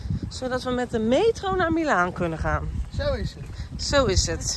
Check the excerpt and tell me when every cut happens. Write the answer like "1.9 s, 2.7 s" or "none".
none